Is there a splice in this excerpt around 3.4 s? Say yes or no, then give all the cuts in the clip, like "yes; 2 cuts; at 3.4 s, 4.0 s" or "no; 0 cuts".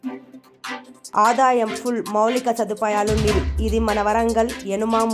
no; 1 cut; at 1.0 s